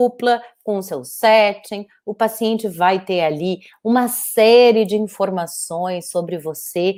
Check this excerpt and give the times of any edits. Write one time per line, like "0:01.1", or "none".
none